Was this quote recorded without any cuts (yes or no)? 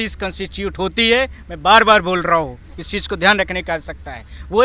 yes